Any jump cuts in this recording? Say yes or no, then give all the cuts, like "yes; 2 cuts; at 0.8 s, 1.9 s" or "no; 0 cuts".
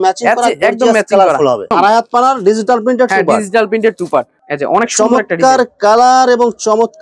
no; 0 cuts